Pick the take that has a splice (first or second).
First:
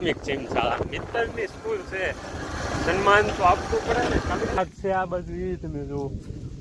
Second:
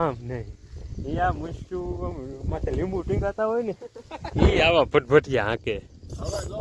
first